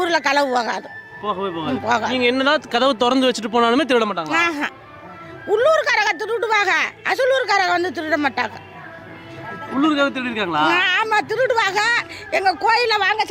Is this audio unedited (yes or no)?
yes